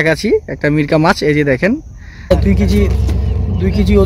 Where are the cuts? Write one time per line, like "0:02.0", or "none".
0:02.3